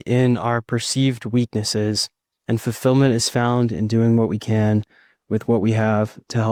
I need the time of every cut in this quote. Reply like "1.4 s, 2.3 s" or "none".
none